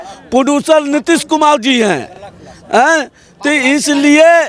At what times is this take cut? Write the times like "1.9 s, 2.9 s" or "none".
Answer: none